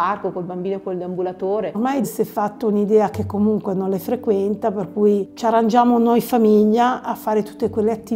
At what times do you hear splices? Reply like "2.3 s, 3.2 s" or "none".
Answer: 1.7 s